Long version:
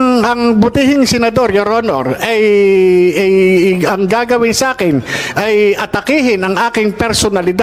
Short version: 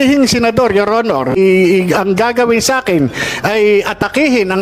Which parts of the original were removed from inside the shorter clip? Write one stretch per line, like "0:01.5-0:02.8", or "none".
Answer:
0:02.1-0:03.3